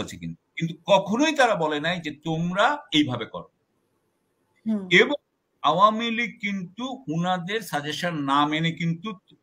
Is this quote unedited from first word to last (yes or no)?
yes